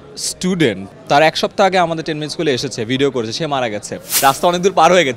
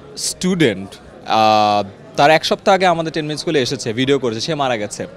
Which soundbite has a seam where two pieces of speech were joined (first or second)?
first